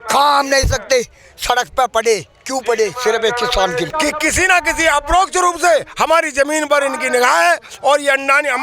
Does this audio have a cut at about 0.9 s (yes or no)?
no